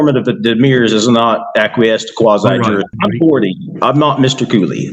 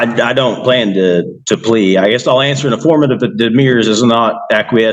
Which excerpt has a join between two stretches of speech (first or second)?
first